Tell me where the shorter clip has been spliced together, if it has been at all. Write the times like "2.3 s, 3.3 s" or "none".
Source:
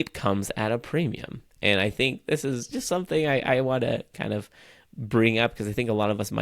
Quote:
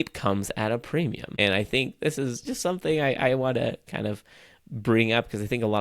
1.2 s